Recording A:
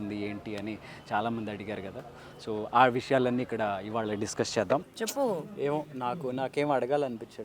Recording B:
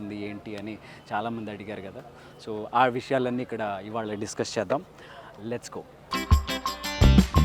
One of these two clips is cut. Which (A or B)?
A